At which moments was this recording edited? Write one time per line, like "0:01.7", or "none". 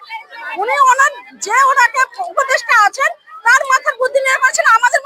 none